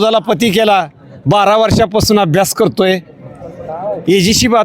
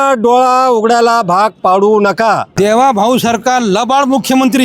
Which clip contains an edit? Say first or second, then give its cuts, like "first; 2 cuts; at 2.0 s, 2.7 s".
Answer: second; 1 cut; at 2.5 s